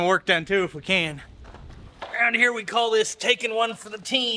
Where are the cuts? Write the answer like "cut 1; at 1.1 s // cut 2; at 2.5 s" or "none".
cut 1; at 1.3 s